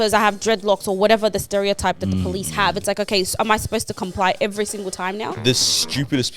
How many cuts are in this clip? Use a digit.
1